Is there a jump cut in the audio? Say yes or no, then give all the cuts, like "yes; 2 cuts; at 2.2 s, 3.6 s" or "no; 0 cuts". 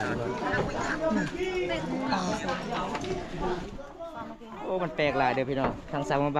no; 0 cuts